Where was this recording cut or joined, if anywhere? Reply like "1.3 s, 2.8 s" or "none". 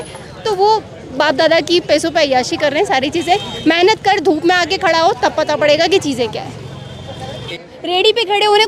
7.5 s